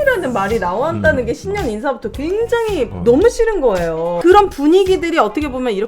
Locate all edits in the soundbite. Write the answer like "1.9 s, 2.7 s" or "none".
4.1 s